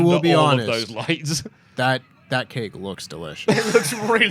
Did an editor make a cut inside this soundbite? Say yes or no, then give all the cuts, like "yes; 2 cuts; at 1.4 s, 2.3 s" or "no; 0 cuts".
no; 0 cuts